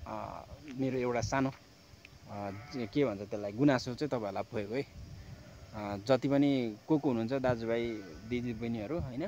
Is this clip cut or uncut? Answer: uncut